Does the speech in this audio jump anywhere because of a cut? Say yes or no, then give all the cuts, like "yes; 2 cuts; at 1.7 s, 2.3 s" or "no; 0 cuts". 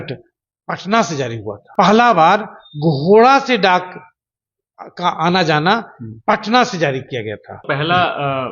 yes; 2 cuts; at 1.6 s, 7.6 s